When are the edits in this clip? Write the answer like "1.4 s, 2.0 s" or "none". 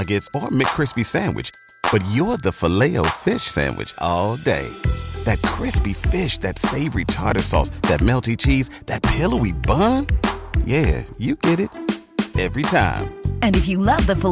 none